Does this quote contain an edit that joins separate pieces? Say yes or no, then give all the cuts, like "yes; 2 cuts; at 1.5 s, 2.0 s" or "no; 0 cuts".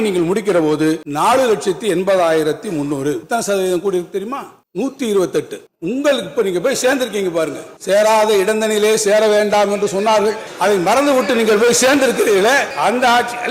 yes; 3 cuts; at 1.1 s, 3.2 s, 5.6 s